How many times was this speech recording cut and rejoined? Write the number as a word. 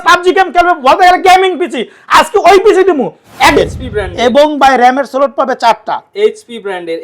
one